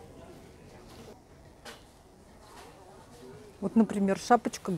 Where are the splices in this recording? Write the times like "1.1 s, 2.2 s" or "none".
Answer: none